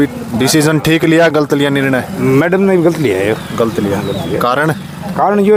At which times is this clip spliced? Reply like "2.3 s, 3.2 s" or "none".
none